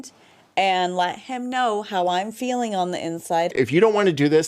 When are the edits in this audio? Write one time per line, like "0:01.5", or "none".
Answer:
0:03.5